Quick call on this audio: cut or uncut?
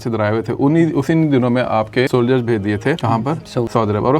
cut